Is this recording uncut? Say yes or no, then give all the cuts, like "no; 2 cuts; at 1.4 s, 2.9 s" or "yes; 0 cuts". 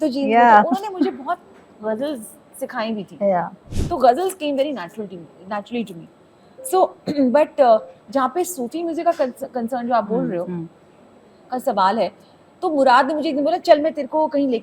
yes; 0 cuts